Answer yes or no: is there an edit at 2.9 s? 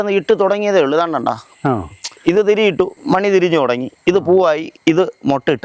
no